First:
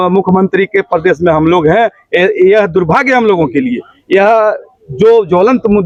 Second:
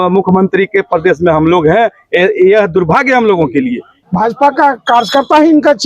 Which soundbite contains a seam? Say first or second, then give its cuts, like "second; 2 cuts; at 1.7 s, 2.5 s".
second; 1 cut; at 3.9 s